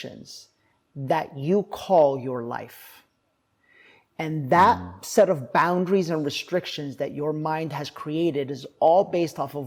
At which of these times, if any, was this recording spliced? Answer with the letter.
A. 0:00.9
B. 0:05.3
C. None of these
C